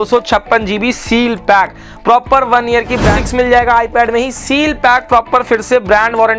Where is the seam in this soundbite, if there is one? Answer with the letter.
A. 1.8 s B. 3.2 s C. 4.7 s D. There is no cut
B